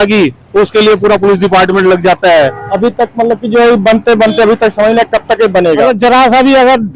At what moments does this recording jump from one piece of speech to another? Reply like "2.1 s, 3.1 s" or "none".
2.6 s, 5.8 s